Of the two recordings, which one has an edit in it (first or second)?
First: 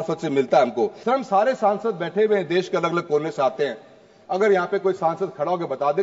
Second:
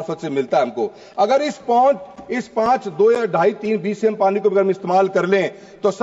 first